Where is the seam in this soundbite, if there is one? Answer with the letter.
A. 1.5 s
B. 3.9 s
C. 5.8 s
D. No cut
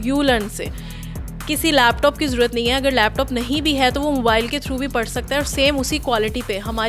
D